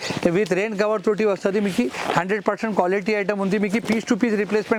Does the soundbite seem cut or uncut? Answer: uncut